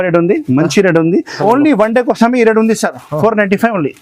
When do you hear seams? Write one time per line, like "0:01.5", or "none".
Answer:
0:01.4